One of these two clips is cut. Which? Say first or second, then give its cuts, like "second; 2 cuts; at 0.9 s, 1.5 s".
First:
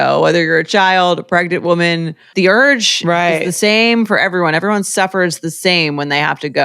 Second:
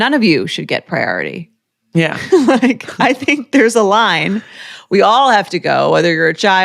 first; 1 cut; at 2.2 s